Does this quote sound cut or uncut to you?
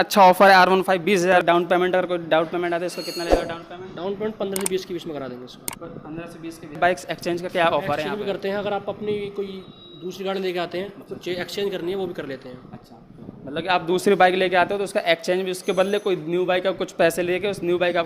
cut